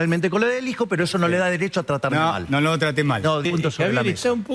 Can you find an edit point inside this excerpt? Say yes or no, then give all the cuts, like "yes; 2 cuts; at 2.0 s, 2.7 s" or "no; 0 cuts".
yes; 1 cut; at 3.4 s